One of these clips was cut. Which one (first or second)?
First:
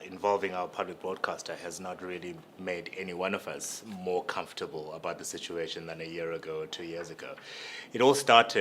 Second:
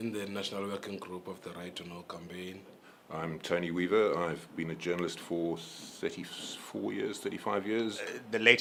first